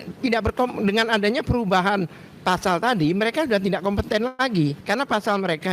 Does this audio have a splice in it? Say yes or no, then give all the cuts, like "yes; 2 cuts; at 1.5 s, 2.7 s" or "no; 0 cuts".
yes; 1 cut; at 4.8 s